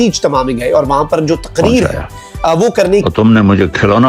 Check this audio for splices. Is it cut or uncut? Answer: cut